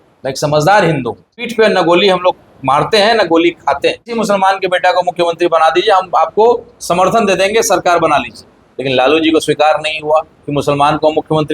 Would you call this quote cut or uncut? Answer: cut